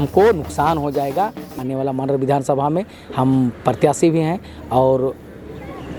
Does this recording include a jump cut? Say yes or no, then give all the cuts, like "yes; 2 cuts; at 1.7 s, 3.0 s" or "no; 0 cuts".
yes; 1 cut; at 1.4 s